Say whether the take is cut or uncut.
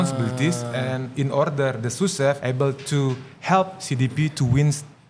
cut